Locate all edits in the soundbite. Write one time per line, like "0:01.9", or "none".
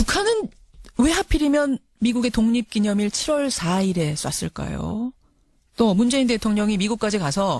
none